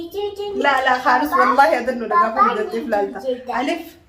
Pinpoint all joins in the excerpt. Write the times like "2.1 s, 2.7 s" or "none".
none